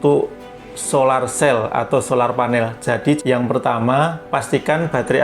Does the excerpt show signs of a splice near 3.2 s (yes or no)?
yes